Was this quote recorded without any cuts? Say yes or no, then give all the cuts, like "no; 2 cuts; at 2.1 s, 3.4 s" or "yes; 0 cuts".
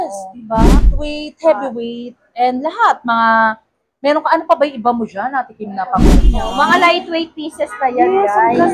no; 2 cuts; at 0.8 s, 6.2 s